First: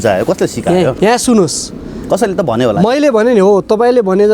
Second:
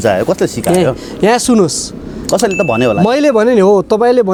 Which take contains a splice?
first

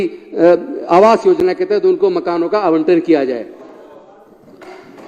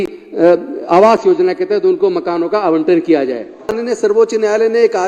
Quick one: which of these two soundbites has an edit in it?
second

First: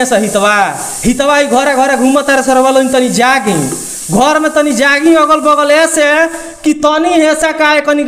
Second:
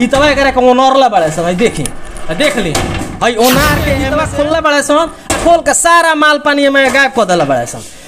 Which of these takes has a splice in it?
second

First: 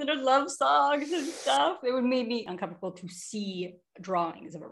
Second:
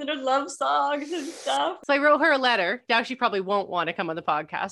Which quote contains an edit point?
second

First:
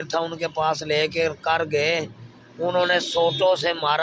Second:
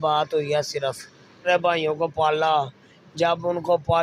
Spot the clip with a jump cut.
second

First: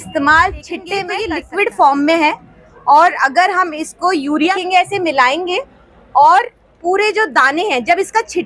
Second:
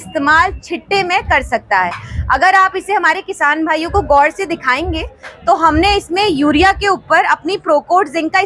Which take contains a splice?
first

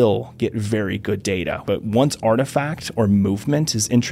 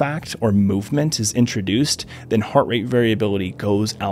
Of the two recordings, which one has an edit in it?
first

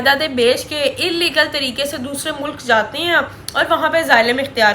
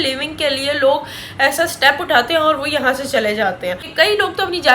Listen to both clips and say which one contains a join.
second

